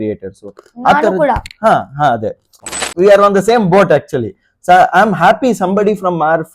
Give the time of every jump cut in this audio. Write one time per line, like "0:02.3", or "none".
0:02.7